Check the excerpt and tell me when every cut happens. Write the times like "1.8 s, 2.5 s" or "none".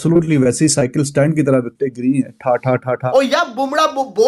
3.1 s